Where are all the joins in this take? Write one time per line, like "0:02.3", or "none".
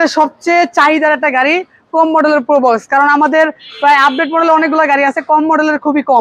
none